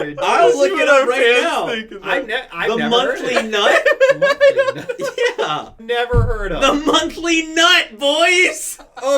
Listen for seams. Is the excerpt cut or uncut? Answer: cut